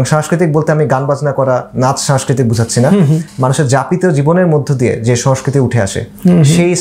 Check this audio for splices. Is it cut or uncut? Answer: uncut